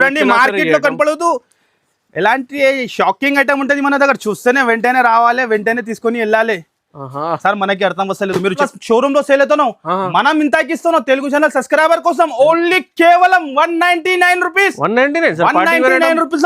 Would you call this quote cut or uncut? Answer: cut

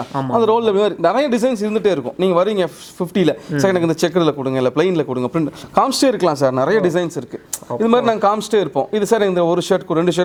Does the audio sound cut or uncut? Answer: uncut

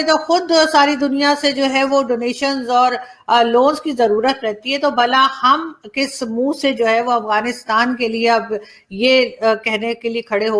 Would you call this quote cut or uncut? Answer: uncut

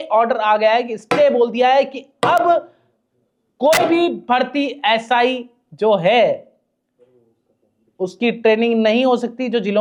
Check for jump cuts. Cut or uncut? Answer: uncut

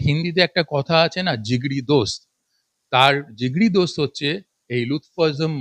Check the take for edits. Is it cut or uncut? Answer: uncut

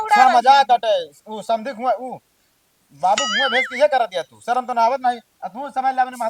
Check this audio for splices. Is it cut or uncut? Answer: uncut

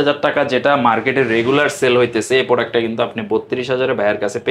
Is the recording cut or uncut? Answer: uncut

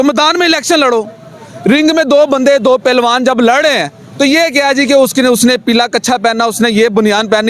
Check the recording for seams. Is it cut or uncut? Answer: uncut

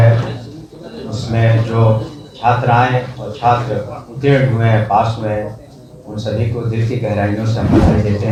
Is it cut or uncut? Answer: uncut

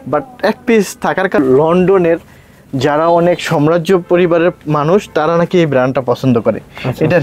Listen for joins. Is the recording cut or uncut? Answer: cut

